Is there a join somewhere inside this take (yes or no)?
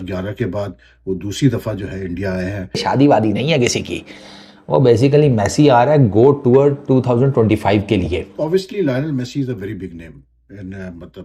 yes